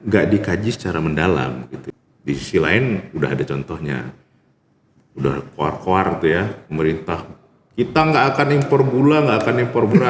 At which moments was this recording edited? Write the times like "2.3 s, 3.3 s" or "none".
1.7 s